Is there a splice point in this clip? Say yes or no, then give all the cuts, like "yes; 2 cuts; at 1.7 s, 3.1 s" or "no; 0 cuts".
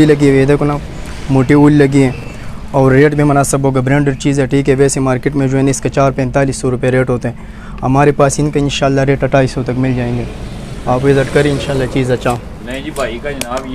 no; 0 cuts